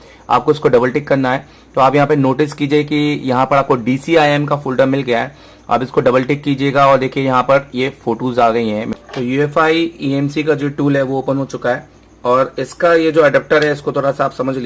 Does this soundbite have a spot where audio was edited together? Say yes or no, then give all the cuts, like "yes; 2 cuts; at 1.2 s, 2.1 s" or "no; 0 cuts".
yes; 1 cut; at 8.9 s